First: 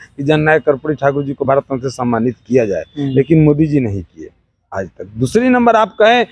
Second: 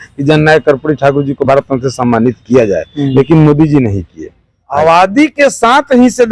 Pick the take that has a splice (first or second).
second